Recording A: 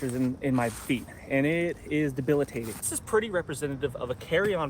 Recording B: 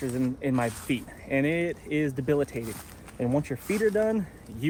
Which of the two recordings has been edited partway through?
A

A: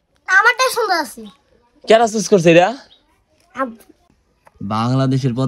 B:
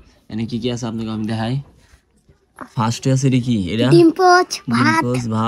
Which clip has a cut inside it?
A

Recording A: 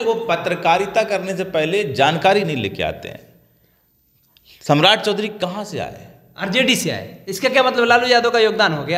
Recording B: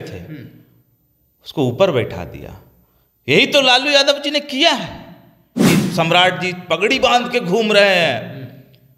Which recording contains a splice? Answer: B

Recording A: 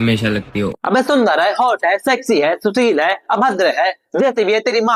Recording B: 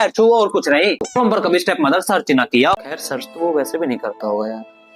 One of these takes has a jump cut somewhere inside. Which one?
B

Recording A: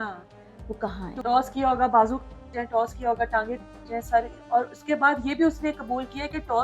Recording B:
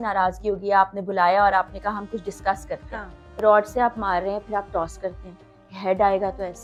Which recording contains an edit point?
A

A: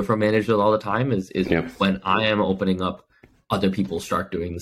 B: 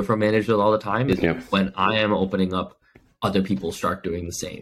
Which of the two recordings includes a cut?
B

